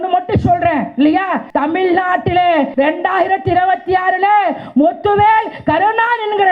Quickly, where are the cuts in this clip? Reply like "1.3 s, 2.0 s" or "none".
1.4 s, 2.7 s